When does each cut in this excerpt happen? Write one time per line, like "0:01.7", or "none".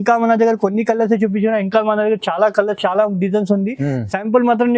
none